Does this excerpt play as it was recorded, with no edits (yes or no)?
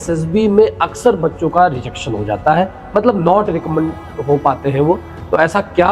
yes